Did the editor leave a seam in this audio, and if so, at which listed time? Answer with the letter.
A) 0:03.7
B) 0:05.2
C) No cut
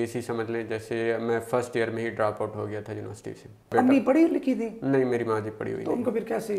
A